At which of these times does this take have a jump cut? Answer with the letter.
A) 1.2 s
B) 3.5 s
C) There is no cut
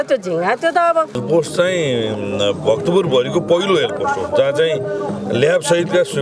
A